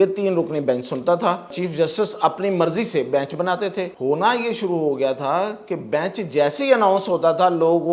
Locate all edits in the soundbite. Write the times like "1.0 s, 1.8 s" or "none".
1.6 s, 3.9 s